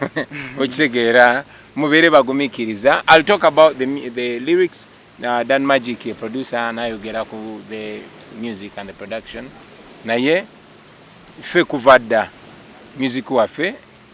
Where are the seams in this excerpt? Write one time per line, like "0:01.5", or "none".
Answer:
none